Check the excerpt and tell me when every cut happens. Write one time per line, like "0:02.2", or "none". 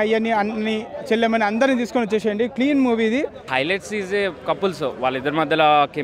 0:03.4